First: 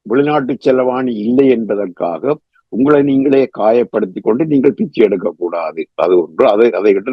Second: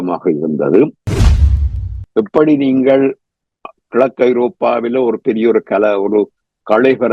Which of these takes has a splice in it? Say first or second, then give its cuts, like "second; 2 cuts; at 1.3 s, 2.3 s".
second; 1 cut; at 1.5 s